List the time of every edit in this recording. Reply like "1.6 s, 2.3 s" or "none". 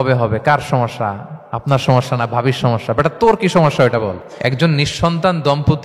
4.3 s